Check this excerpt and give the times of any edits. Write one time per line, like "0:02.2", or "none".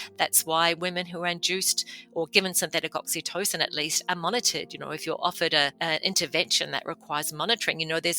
0:05.7